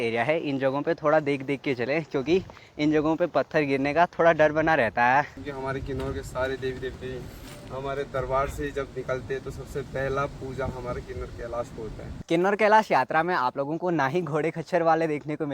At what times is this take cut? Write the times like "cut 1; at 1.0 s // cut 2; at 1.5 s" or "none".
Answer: cut 1; at 5.3 s // cut 2; at 12.1 s